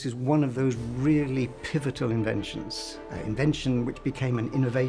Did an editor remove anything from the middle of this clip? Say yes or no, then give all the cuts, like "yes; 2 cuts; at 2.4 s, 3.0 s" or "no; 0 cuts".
no; 0 cuts